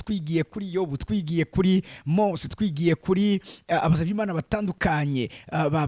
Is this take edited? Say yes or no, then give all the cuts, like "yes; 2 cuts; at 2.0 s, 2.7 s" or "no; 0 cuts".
no; 0 cuts